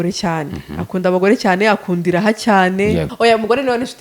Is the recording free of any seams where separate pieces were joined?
no; 1 cut; at 3.1 s

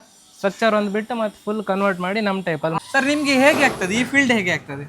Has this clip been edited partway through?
yes; 1 cut; at 2.8 s

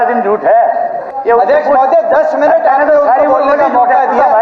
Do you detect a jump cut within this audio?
yes; 1 cut; at 1.0 s

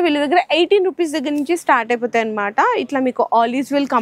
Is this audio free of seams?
yes; 0 cuts

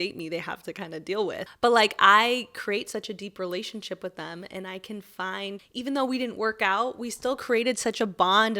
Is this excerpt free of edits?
no; 2 cuts; at 1.5 s, 5.6 s

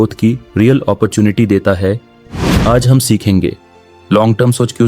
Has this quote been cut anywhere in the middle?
yes; 1 cut; at 2.1 s

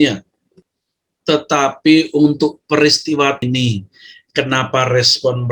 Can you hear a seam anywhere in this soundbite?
yes; 1 cut; at 3.4 s

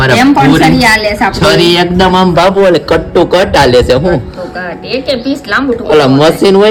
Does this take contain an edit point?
no; 0 cuts

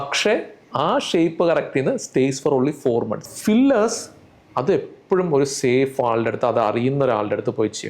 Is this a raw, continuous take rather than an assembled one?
no; 1 cut; at 3.3 s

